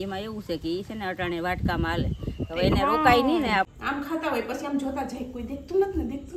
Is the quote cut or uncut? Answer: cut